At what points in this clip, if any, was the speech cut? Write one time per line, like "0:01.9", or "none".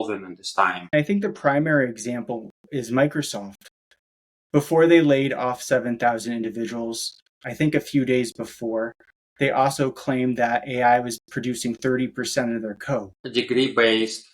0:00.9
0:13.2